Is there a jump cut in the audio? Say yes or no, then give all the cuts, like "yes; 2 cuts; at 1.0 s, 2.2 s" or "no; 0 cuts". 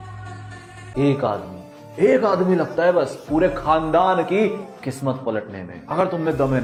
no; 0 cuts